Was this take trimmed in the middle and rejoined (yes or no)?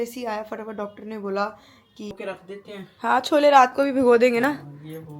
yes